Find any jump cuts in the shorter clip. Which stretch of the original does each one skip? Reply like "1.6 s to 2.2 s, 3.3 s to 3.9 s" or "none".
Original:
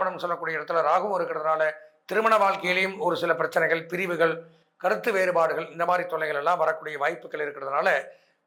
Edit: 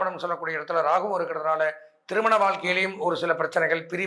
none